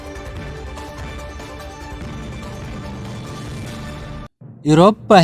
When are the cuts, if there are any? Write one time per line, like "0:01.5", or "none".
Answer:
0:03.6
0:04.3